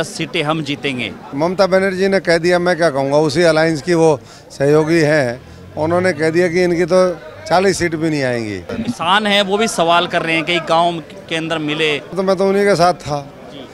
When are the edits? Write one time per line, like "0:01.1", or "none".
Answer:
0:01.3
0:08.6
0:12.2